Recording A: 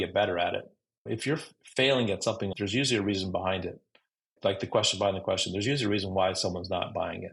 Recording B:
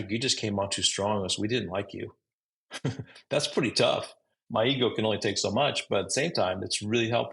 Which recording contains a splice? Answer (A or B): B